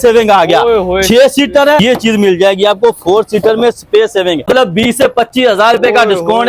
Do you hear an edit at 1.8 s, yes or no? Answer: yes